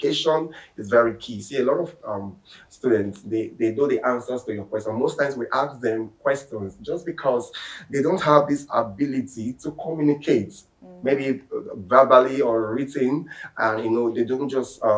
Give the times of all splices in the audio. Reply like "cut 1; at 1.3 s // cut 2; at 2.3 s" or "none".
none